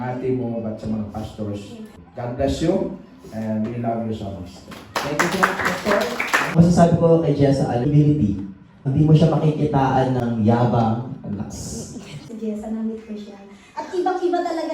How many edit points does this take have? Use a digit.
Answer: 3